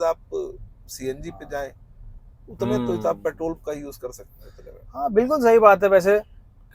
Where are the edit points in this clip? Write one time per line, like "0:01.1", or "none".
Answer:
none